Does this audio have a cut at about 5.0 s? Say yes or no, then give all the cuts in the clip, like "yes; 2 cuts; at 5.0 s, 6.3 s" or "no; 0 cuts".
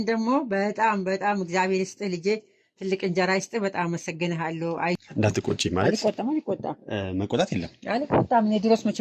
yes; 1 cut; at 5.0 s